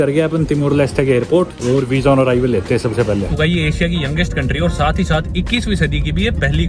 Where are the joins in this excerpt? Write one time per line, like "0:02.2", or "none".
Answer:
0:01.6
0:03.3